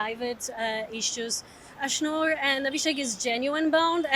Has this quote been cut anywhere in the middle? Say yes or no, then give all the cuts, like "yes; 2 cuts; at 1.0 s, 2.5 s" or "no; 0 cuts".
yes; 1 cut; at 1.7 s